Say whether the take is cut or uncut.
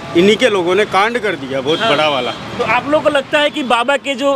uncut